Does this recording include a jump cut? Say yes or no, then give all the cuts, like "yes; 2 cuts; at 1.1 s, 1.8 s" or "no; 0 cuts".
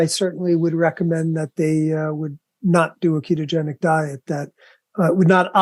no; 0 cuts